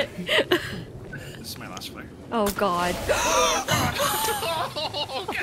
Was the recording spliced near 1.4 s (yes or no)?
yes